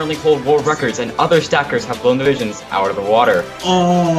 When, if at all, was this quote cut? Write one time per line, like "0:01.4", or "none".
0:02.2